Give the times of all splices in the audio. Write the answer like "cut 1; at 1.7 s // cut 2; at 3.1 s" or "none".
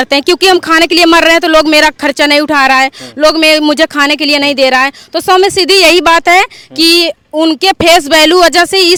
none